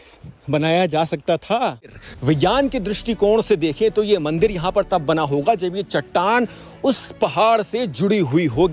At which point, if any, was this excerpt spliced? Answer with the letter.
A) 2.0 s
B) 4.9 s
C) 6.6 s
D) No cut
A